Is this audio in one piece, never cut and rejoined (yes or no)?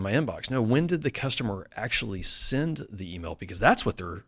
yes